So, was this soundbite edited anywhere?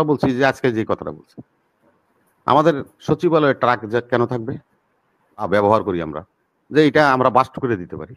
yes; 1 cut; at 5.5 s

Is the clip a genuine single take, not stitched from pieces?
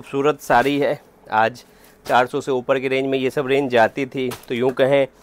yes; 0 cuts

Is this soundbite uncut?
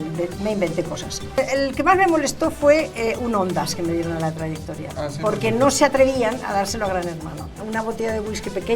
no; 2 cuts; at 1.4 s, 7.6 s

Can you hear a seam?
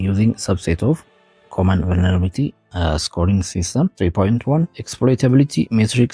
yes; 2 cuts; at 3.9 s, 4.8 s

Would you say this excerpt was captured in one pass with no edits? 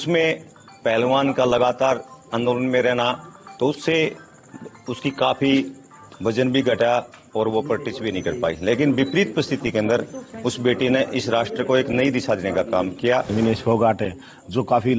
no; 1 cut; at 13.3 s

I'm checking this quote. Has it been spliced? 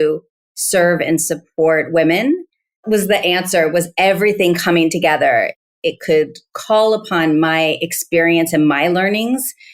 yes; 1 cut; at 2.8 s

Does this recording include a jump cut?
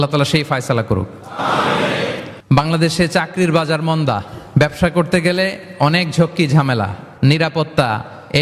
yes; 1 cut; at 2.3 s

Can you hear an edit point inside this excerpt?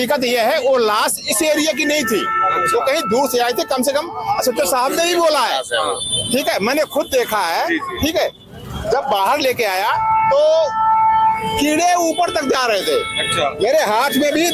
no; 0 cuts

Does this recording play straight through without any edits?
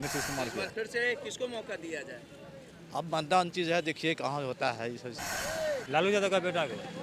no; 1 cut; at 5.2 s

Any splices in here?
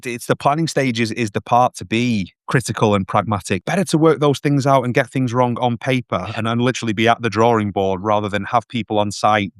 yes; 2 cuts; at 2.4 s, 3.6 s

